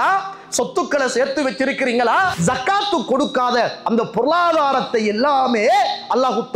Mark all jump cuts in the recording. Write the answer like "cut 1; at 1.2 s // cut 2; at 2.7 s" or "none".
cut 1; at 2.3 s